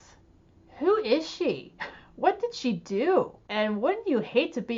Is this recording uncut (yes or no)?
no